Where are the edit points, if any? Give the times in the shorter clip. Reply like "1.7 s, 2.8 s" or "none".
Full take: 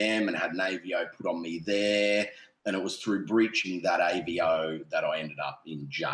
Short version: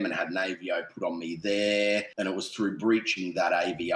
2.1 s